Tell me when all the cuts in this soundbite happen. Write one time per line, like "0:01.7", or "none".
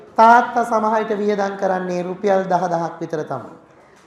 none